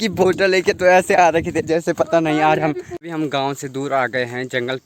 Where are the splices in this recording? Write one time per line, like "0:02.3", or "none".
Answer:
0:02.9